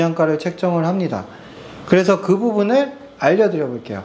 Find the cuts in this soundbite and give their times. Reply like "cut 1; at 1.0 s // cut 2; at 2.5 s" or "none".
none